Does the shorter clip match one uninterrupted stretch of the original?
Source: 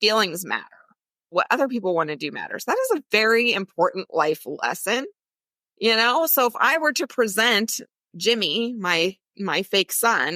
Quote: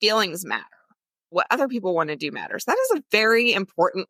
yes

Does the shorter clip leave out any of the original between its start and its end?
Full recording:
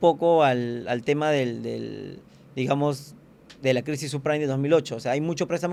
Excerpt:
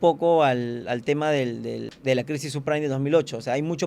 yes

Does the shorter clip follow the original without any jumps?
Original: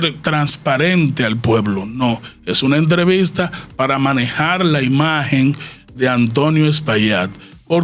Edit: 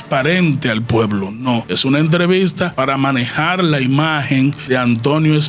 no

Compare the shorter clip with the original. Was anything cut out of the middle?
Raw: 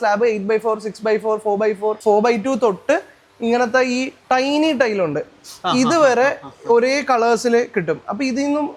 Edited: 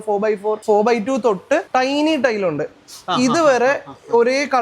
yes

